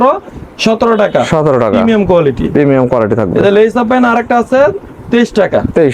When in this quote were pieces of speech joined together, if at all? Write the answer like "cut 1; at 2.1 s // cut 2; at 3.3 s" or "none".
none